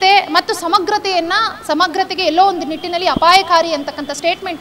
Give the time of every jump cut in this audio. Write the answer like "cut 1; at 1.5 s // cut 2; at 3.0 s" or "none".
none